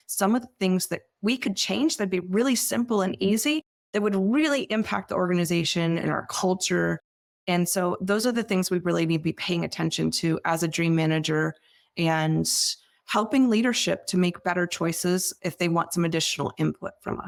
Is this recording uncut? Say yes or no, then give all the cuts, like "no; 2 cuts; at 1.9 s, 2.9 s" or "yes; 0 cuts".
yes; 0 cuts